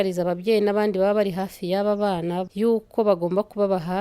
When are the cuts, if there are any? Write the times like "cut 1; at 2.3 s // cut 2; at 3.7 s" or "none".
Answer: cut 1; at 2.5 s